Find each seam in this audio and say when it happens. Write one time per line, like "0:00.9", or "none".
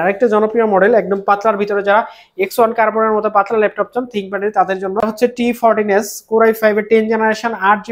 0:05.0